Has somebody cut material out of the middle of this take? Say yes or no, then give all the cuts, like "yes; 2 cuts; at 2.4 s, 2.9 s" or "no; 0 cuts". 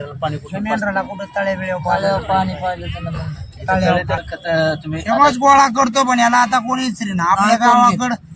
yes; 1 cut; at 4.2 s